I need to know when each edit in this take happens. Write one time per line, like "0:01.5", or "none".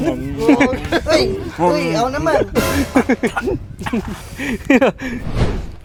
none

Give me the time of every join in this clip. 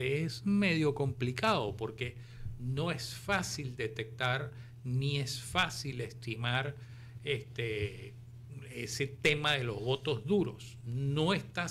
none

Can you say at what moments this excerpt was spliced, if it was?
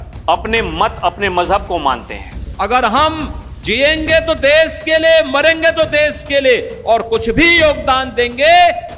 0:02.5

